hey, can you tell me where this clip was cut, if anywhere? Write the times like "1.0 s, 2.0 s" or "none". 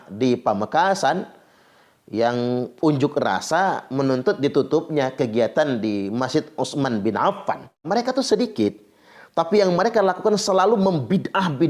7.9 s

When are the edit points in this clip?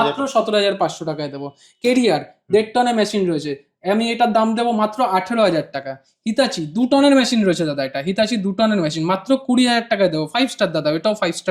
none

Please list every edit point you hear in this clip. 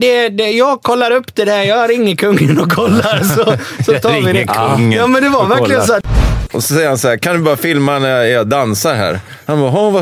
6.1 s

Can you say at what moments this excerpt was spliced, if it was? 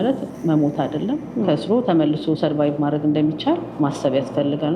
3.7 s

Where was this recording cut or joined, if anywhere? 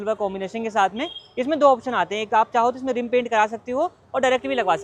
none

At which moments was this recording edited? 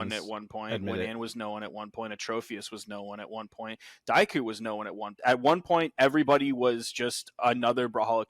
5.2 s

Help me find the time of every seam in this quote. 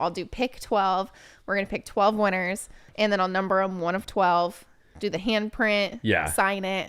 2.9 s

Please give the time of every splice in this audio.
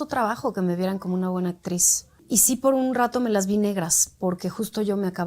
2.2 s

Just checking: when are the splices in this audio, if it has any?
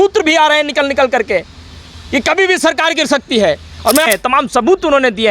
4.1 s

